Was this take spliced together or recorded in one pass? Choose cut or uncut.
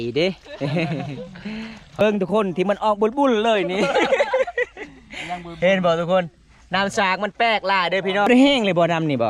cut